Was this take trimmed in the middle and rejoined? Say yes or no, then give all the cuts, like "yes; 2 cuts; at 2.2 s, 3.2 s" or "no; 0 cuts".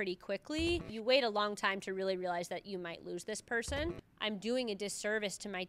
yes; 2 cuts; at 0.9 s, 3.9 s